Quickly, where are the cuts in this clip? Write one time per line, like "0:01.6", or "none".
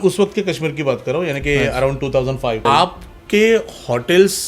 0:02.6